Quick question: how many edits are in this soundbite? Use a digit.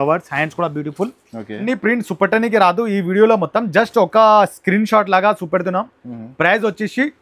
1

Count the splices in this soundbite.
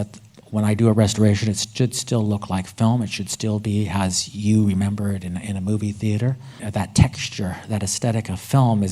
1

